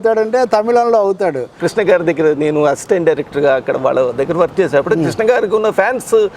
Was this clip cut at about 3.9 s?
no; 1 cut; at 1.6 s

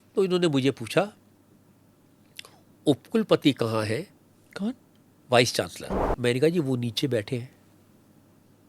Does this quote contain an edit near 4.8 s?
no; 1 cut; at 6.0 s

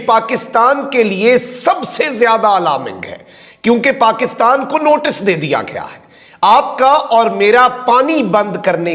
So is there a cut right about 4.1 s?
no; 0 cuts

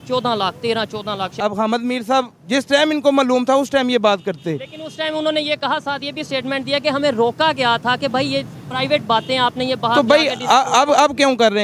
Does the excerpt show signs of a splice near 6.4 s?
no; 1 cut; at 1.4 s

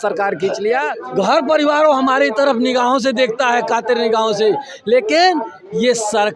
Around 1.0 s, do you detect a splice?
yes; 1 cut; at 1.0 s

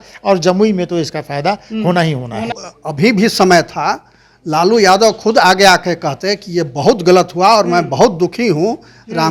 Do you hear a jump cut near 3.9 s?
no; 1 cut; at 2.5 s

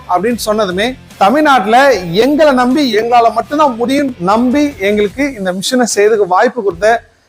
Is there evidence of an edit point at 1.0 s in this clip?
yes; 3 cuts; at 1.0 s, 2.9 s, 4.2 s

